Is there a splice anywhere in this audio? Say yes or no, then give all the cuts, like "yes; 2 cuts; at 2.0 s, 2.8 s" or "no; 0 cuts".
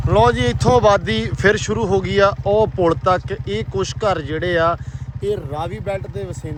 no; 0 cuts